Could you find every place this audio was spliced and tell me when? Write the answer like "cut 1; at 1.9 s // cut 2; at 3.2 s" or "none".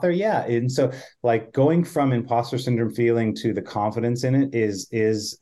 none